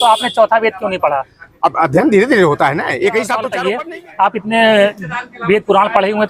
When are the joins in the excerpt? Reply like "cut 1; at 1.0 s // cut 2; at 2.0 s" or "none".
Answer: cut 1; at 3.5 s